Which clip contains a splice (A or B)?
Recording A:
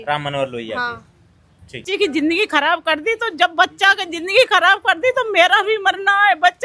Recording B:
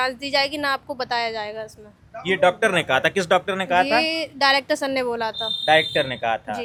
A